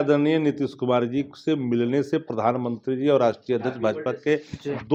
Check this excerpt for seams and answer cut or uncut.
uncut